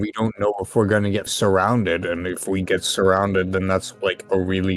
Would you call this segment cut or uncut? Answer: cut